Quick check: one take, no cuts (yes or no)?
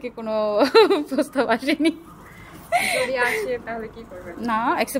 yes